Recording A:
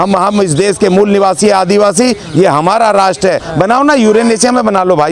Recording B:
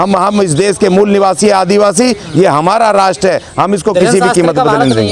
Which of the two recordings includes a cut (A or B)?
A